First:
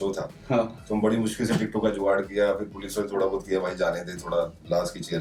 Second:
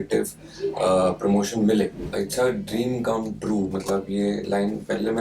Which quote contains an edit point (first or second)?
second